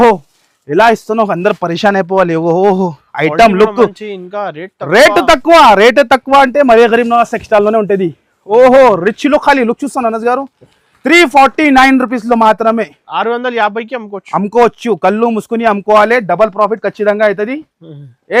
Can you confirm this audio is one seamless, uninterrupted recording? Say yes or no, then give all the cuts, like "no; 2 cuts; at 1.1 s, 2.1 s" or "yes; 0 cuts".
yes; 0 cuts